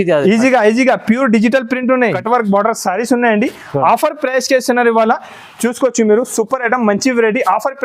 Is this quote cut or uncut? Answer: cut